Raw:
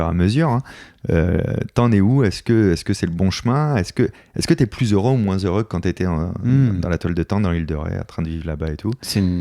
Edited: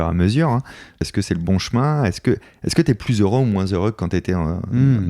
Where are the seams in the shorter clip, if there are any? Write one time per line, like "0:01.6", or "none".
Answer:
0:01.0